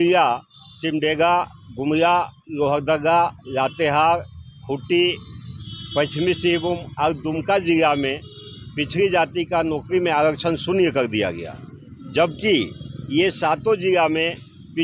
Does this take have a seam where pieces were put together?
no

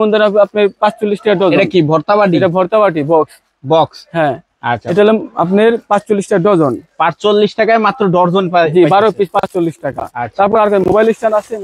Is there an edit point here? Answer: no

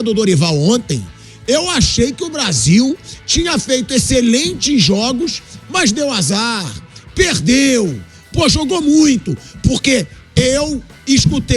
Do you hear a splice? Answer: no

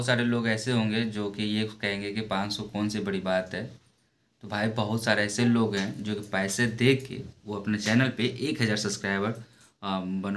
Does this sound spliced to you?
no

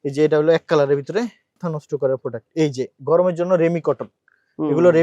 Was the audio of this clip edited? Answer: yes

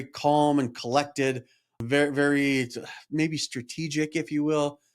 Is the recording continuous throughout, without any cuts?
no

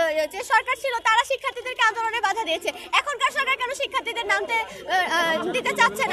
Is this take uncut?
yes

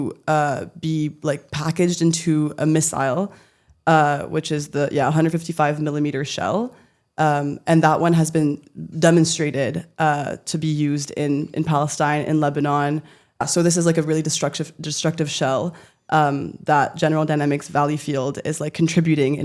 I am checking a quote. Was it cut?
yes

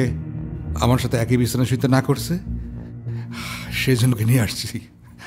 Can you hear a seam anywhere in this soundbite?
no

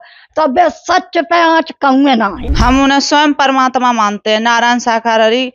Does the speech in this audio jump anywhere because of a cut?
yes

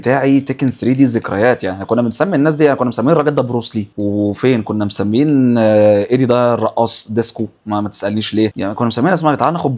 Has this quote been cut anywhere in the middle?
no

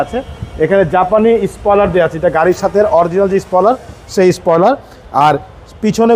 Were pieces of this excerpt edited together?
no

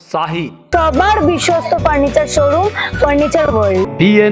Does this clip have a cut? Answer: no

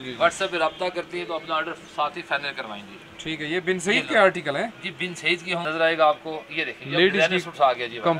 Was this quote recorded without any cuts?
no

